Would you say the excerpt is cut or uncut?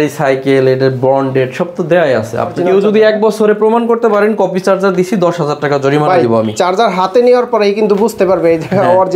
cut